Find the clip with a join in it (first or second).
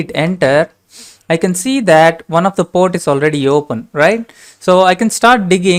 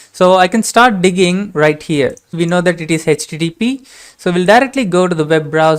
second